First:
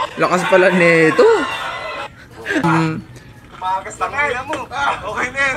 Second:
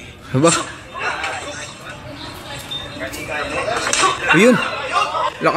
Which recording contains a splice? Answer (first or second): first